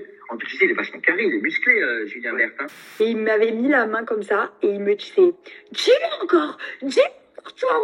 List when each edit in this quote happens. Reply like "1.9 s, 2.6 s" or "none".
3.0 s